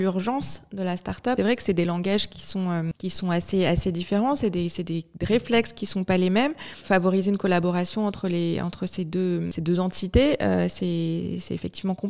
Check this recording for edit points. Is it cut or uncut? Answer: cut